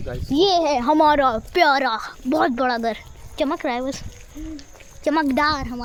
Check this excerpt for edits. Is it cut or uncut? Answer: uncut